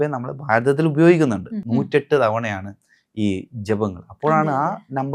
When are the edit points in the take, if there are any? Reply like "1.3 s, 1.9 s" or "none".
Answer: 1.5 s